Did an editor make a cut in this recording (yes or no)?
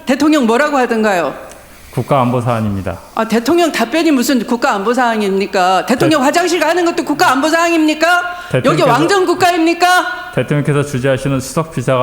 no